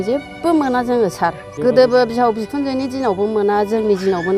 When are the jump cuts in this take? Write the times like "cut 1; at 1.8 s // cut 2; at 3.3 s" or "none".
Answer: cut 1; at 1.5 s